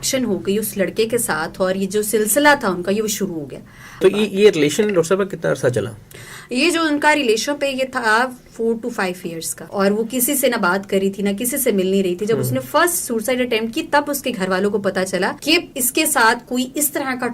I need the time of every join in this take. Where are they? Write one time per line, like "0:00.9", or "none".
0:04.0
0:09.6